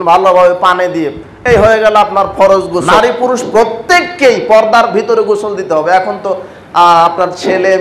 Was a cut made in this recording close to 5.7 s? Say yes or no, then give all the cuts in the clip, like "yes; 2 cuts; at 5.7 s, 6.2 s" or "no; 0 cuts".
no; 1 cut; at 2.9 s